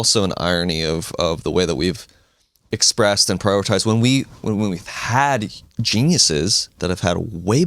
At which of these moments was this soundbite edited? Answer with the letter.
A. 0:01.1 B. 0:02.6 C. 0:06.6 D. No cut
C